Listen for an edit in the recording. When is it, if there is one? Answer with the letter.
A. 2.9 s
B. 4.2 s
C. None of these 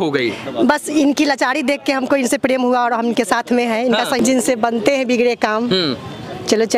B